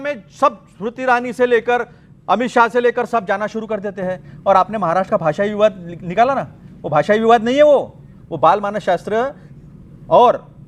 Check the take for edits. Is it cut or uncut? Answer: uncut